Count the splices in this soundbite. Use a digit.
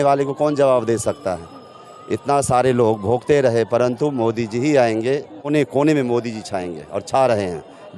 1